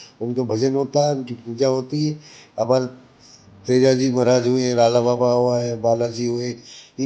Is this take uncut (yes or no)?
yes